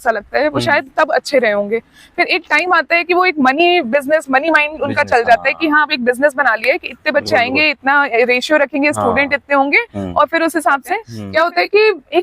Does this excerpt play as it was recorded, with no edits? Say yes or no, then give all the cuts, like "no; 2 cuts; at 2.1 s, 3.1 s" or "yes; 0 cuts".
no; 1 cut; at 11.2 s